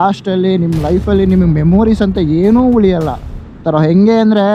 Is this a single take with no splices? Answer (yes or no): no